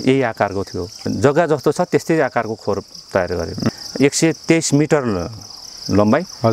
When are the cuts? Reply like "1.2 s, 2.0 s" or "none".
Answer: 1.0 s, 3.8 s